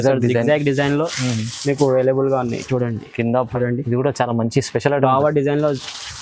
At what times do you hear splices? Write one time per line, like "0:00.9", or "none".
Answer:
0:03.4